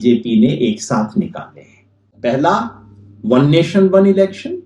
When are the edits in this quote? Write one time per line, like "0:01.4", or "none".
0:02.1